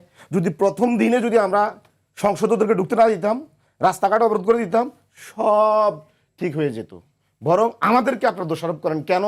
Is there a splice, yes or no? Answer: no